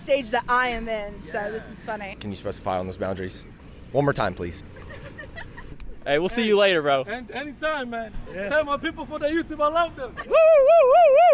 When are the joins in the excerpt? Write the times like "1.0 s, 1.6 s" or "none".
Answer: 2.1 s, 5.7 s